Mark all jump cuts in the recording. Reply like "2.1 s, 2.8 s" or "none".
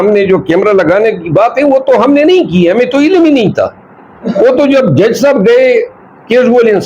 none

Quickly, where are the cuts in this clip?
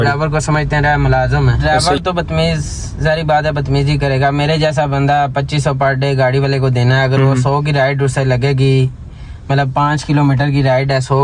1.7 s

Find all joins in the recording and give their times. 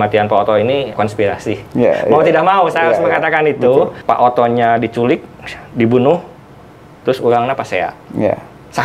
0.9 s, 4.0 s

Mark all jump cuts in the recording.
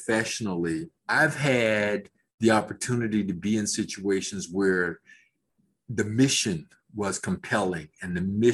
0.9 s

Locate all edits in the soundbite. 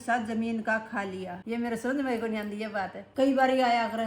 1.4 s, 3.0 s

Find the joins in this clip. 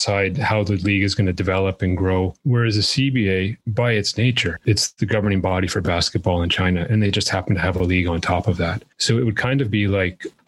2.4 s, 3.6 s, 4.6 s, 8.9 s

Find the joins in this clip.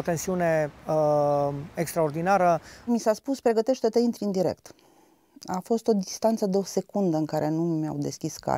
2.7 s

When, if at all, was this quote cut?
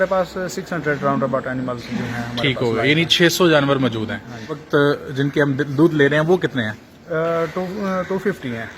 4.6 s

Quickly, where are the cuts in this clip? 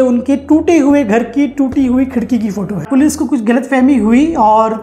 2.8 s

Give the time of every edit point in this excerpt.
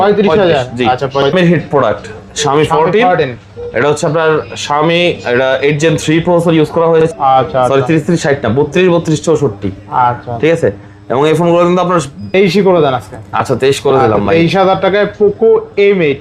1.3 s, 7.1 s, 12.3 s

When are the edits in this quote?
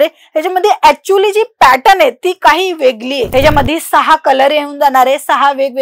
3.2 s

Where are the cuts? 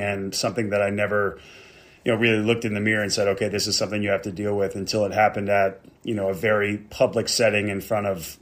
6.9 s

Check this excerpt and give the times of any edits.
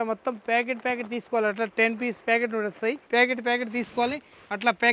3.0 s

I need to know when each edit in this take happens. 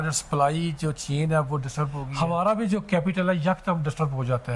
2.0 s

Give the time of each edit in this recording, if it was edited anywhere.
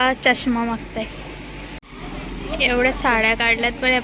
1.9 s

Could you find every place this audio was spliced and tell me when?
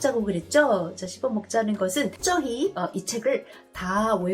2.2 s

